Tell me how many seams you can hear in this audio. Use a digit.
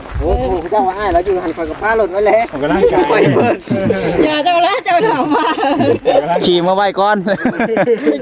0